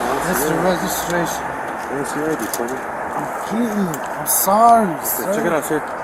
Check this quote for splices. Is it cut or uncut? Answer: uncut